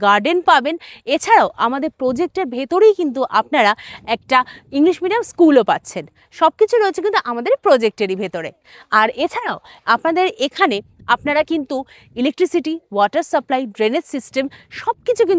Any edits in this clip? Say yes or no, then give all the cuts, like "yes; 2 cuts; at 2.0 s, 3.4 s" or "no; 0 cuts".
no; 0 cuts